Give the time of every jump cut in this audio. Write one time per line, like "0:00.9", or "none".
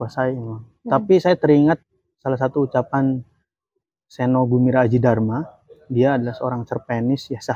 none